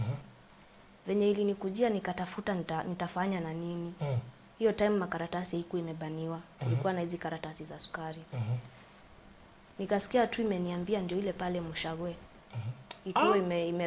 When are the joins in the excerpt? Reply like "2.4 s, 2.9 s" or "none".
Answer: none